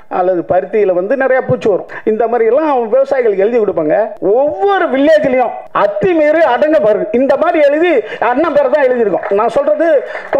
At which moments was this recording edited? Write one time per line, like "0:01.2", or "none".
0:01.9
0:04.1
0:05.6